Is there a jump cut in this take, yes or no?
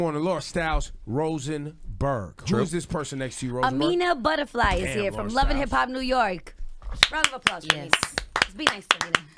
no